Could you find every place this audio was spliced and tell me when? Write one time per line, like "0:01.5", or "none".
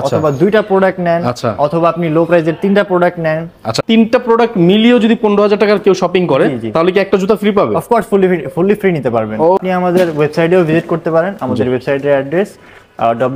0:03.7
0:09.6